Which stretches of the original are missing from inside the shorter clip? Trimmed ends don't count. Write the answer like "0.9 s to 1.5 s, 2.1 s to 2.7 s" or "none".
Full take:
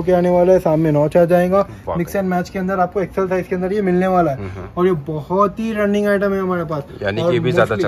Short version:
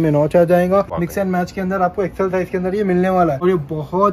1.7 s to 1.9 s, 4.4 s to 4.7 s